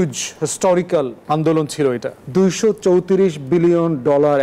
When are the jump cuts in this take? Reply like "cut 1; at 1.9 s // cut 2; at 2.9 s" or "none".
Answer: cut 1; at 1.2 s // cut 2; at 2.2 s